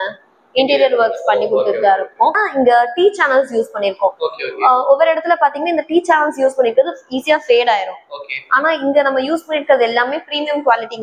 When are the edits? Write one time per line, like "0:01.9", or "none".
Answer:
0:02.4